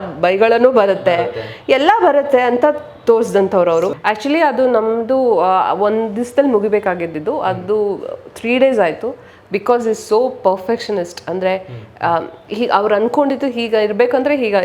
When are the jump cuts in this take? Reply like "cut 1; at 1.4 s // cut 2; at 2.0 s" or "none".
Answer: cut 1; at 3.9 s